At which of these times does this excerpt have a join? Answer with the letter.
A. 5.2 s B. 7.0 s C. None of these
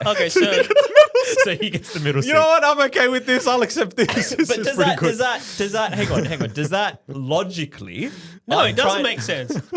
C